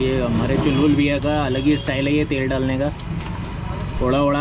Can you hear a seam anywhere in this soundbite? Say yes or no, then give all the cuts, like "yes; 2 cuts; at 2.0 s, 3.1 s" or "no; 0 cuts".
no; 0 cuts